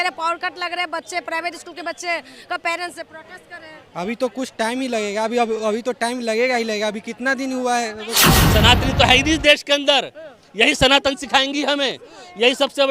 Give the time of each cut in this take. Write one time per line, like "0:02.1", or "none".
0:08.3